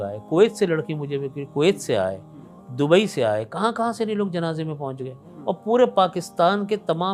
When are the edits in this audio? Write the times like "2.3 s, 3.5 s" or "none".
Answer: none